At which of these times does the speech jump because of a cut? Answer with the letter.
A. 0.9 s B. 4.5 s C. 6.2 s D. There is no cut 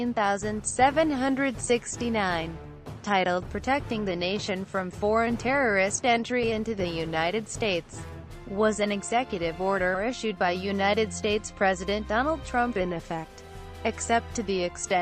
A